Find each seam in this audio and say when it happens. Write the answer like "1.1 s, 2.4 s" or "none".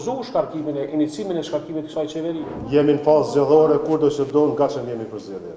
2.6 s